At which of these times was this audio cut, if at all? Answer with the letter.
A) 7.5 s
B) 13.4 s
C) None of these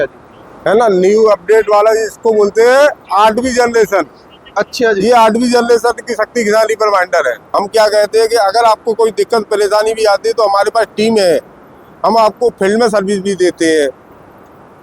A